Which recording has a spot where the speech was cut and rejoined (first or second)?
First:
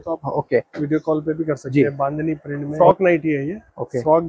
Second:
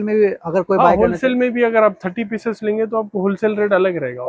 first